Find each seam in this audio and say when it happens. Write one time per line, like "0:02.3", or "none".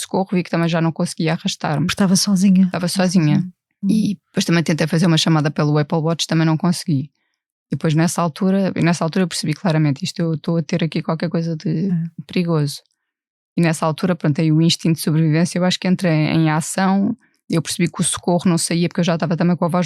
0:03.6